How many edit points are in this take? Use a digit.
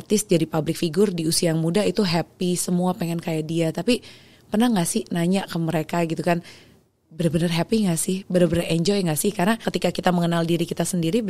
1